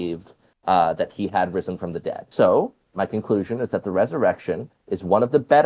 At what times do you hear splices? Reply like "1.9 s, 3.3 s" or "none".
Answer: 2.2 s